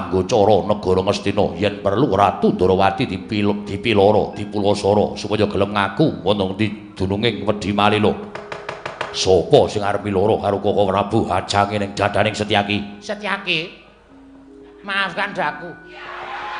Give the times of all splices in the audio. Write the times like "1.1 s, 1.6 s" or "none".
none